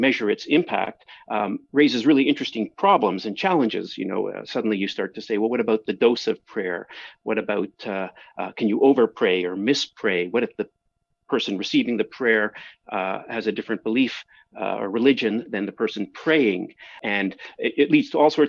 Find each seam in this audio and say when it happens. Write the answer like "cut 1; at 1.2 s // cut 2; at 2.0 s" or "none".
cut 1; at 17.0 s